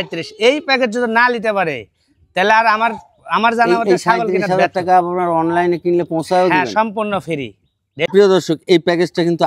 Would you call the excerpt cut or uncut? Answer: cut